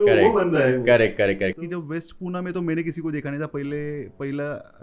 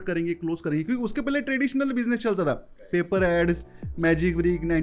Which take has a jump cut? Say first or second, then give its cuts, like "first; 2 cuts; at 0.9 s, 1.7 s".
first; 1 cut; at 1.7 s